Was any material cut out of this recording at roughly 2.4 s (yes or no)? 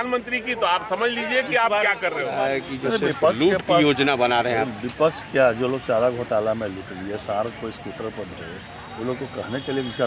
yes